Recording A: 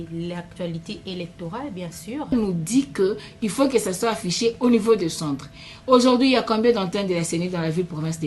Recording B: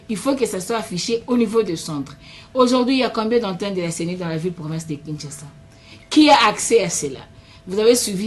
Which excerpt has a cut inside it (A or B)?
A